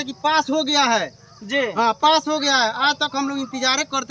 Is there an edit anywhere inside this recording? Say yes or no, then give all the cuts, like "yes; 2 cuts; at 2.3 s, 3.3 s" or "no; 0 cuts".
no; 0 cuts